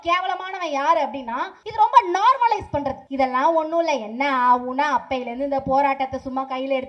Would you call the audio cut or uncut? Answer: cut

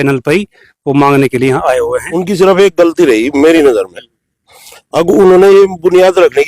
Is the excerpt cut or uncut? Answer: cut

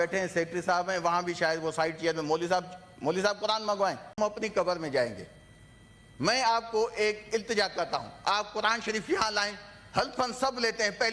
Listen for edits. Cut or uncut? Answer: cut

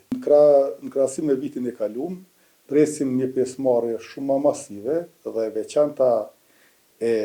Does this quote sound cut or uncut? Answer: uncut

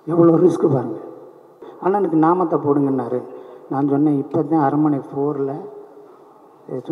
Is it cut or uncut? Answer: cut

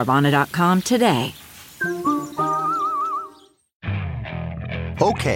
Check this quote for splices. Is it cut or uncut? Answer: cut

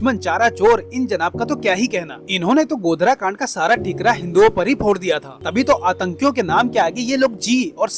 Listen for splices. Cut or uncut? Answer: cut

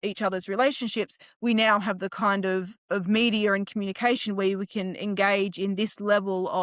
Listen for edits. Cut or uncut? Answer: uncut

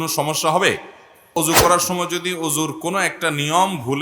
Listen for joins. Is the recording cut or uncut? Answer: cut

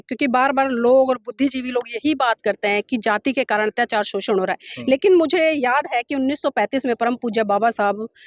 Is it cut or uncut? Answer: uncut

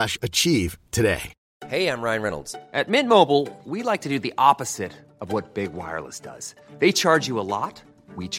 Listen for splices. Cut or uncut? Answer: cut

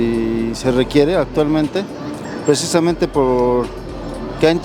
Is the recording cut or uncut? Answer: uncut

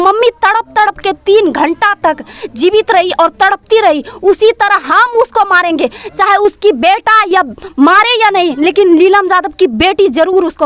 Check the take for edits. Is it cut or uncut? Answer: uncut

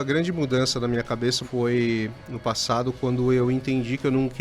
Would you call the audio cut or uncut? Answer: cut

